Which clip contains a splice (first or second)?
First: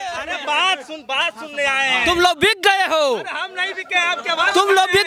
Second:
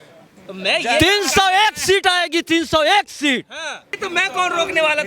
second